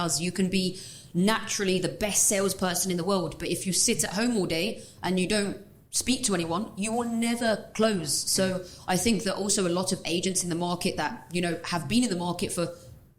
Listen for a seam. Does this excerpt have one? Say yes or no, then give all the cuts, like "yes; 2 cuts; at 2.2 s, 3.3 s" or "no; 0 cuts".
no; 0 cuts